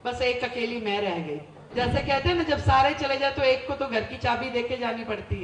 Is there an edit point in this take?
yes; 1 cut; at 1.6 s

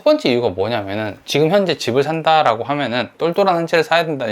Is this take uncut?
no; 2 cuts; at 1.2 s, 3.1 s

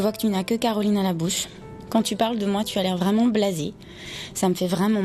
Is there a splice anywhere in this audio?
no; 0 cuts

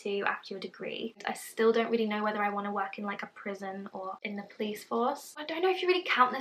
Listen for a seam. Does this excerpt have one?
yes; 3 cuts; at 1.2 s, 4.2 s, 5.3 s

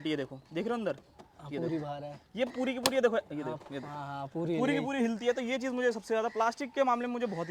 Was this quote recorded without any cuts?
yes; 0 cuts

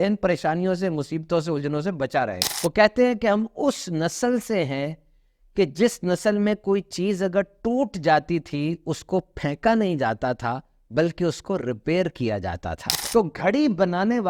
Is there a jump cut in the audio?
yes; 2 cuts; at 2.4 s, 12.9 s

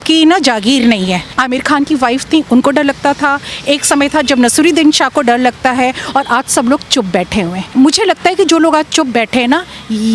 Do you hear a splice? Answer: yes; 2 cuts; at 1.3 s, 7.6 s

